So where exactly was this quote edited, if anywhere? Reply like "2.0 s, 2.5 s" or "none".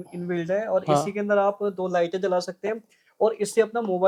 none